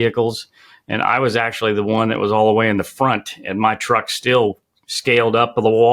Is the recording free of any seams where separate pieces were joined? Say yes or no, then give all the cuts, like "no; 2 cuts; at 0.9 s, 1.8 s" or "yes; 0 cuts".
yes; 0 cuts